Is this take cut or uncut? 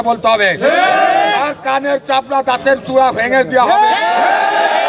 uncut